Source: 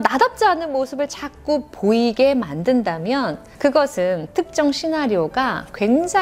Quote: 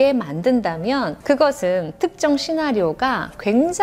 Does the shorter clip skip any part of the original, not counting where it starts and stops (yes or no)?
yes